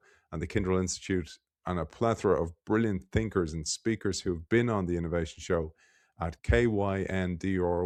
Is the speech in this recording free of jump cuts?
yes; 0 cuts

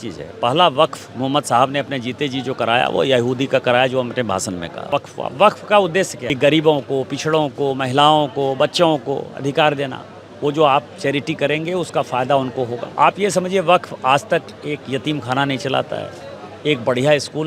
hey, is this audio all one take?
no; 3 cuts; at 4.8 s, 6.2 s, 12.8 s

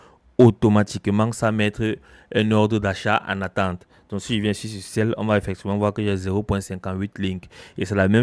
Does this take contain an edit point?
no; 0 cuts

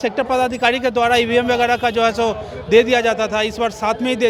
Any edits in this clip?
no; 0 cuts

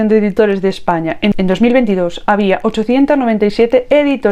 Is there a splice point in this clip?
no; 0 cuts

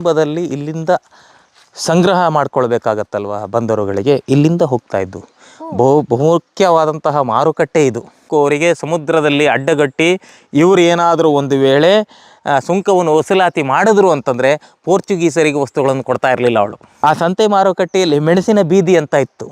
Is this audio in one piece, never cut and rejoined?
no; 2 cuts; at 8.2 s, 16.8 s

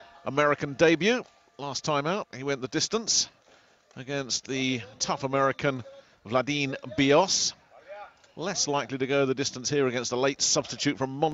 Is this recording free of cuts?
yes; 0 cuts

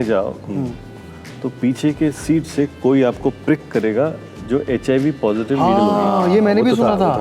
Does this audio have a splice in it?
no; 0 cuts

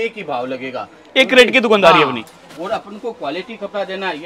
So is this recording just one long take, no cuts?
yes; 0 cuts

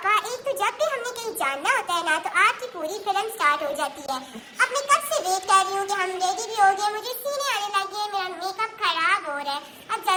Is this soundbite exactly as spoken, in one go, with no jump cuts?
yes; 0 cuts

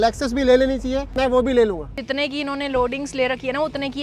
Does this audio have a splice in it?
yes; 2 cuts; at 1.1 s, 2.0 s

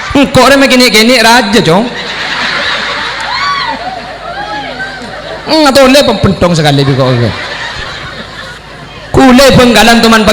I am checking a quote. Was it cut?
yes; 1 cut; at 8.6 s

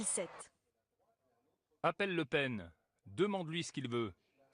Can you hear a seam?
yes; 1 cut; at 1.3 s

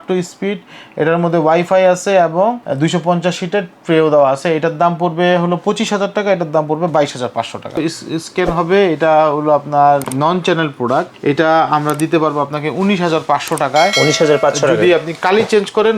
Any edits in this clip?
yes; 4 cuts; at 2.6 s, 7.8 s, 10.1 s, 11.1 s

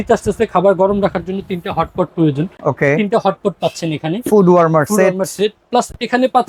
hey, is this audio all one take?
yes; 0 cuts

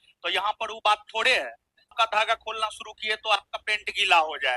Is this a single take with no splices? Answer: no; 1 cut; at 1.9 s

